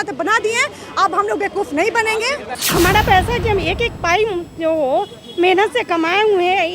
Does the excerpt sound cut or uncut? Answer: cut